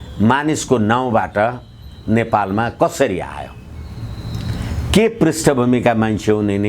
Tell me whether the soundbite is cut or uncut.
uncut